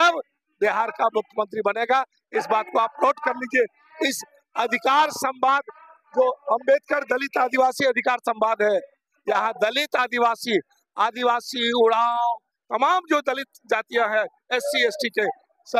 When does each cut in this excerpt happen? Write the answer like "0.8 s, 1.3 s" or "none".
none